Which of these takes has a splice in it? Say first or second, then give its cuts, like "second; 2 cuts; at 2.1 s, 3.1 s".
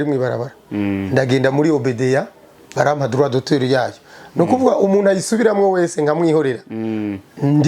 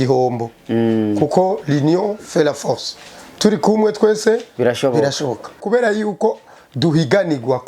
second; 1 cut; at 5.6 s